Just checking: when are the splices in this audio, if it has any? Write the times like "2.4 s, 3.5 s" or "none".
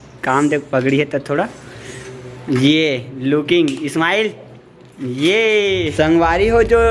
5.9 s